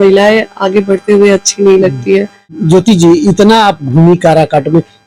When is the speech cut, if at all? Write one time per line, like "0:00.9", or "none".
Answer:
0:02.5